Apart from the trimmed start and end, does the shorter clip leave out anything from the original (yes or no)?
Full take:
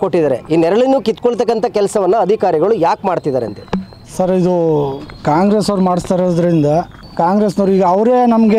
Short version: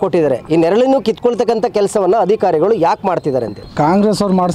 yes